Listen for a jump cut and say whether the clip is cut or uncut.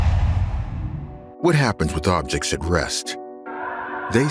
cut